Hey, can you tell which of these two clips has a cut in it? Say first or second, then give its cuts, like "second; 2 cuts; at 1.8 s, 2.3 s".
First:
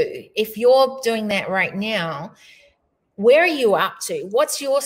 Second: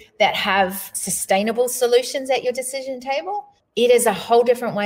second; 1 cut; at 3.6 s